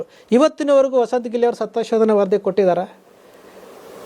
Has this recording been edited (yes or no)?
no